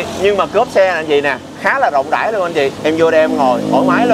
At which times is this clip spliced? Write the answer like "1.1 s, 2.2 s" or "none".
2.8 s